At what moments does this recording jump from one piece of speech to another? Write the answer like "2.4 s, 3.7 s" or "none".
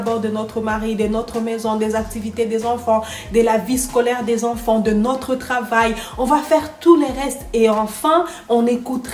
none